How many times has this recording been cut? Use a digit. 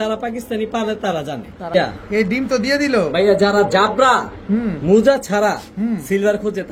1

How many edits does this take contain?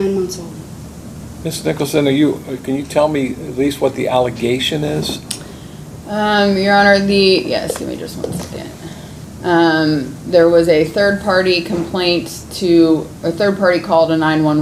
0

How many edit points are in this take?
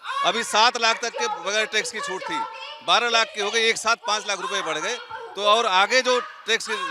0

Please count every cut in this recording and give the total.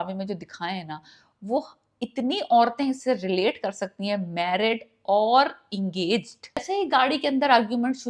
1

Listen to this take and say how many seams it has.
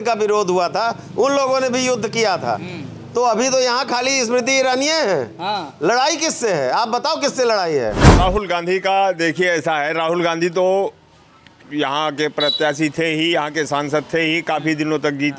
1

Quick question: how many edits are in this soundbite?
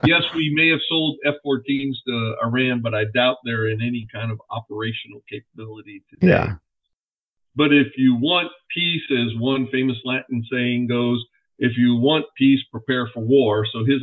1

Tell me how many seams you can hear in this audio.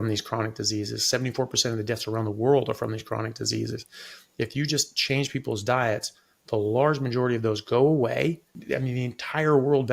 1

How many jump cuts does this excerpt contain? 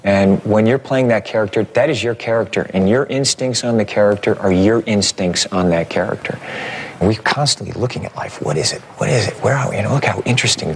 0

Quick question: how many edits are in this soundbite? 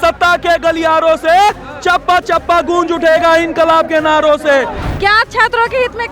1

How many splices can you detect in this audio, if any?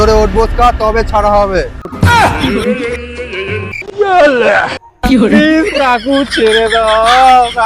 1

